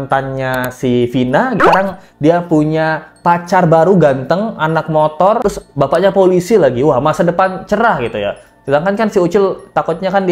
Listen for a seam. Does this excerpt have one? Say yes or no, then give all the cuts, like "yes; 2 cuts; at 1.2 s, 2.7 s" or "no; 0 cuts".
yes; 1 cut; at 1.6 s